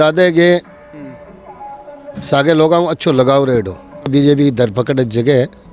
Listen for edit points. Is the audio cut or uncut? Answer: cut